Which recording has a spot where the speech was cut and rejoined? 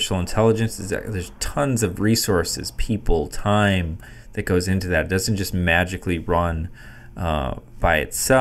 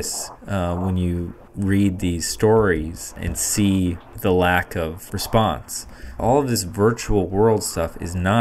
second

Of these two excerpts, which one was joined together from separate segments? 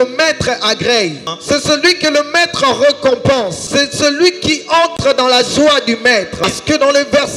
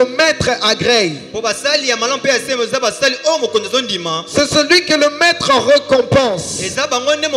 first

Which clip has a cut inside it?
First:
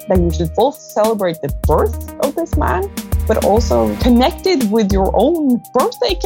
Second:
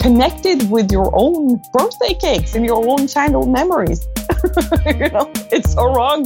second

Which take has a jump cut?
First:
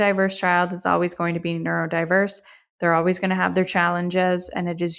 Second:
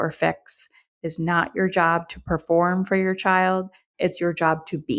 second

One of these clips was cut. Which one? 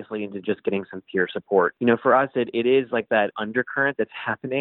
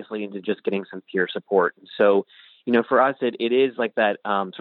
first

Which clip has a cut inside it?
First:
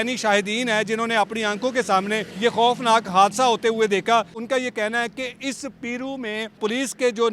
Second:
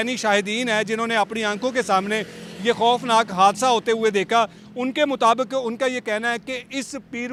first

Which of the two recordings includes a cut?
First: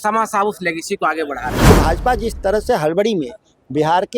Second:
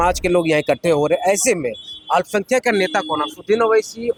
first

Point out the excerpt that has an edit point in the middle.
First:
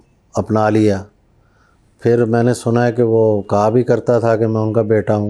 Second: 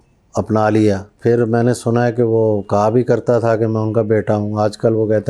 second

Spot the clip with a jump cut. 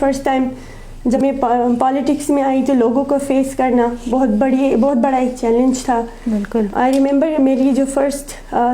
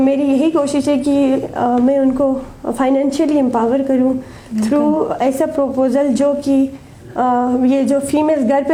first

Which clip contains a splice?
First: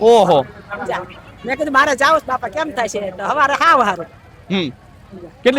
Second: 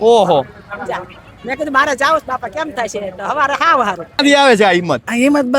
second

